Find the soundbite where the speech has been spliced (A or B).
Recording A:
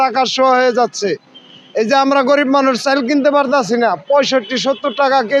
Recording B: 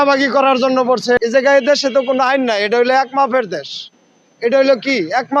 B